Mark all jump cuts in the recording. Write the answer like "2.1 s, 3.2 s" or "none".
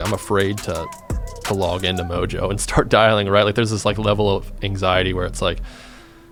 none